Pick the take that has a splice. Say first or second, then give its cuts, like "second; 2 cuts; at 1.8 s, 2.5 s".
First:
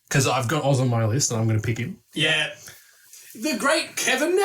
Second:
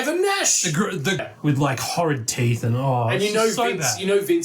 second; 1 cut; at 1.3 s